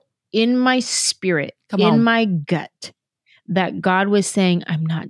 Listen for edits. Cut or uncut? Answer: uncut